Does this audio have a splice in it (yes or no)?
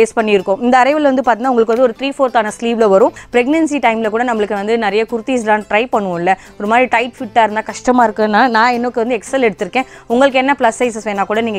yes